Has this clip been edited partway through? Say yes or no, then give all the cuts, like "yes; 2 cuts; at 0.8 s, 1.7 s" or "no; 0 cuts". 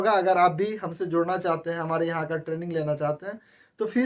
no; 0 cuts